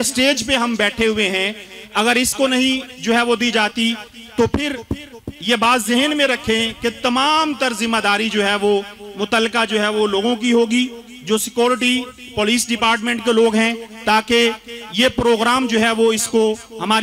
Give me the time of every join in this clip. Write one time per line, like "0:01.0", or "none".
none